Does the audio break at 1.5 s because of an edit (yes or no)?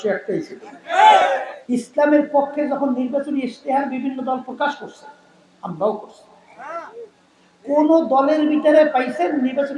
yes